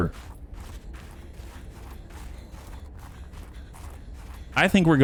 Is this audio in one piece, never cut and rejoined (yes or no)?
yes